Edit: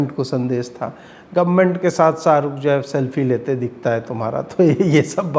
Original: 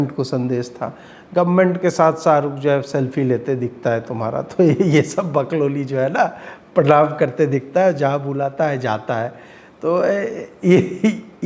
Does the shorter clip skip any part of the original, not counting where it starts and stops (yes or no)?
no